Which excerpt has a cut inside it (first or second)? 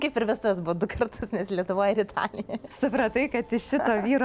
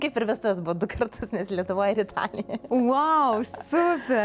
first